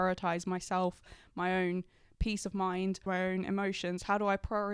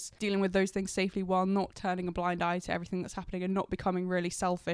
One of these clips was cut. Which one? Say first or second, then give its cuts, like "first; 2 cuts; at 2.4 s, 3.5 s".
first; 1 cut; at 3.0 s